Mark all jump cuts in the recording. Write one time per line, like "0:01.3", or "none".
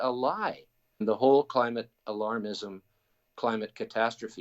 0:01.0